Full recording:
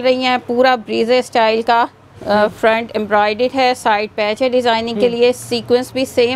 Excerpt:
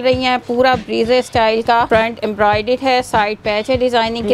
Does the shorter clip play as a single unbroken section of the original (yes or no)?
no